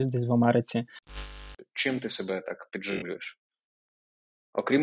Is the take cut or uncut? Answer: cut